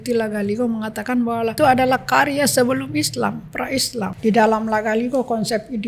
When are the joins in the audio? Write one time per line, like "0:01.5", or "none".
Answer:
0:01.5
0:04.1